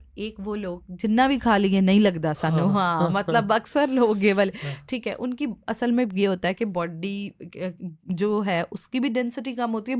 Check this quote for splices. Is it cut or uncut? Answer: uncut